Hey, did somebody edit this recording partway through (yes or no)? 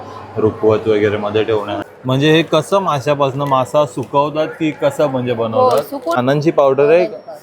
yes